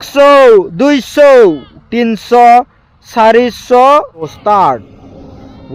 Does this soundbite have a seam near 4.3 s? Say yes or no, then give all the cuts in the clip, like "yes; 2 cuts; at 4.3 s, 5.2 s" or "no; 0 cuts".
yes; 1 cut; at 4.3 s